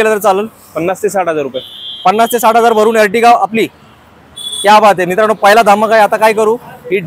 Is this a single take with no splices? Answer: yes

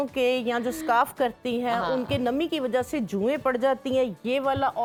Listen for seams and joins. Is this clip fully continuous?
yes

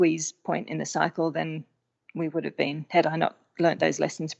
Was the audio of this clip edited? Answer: no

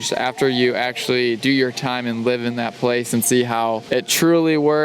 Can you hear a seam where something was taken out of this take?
yes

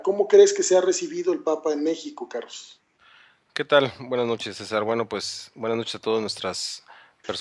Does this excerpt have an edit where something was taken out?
yes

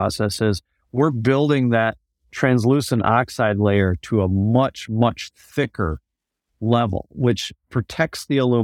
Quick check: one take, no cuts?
yes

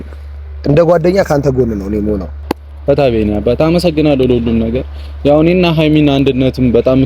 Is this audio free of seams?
no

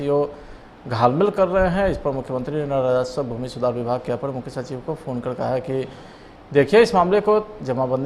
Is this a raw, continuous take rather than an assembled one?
yes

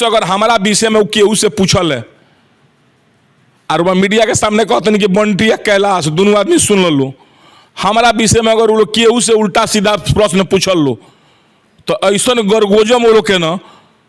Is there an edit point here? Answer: no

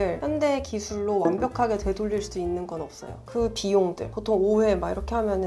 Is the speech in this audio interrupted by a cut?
yes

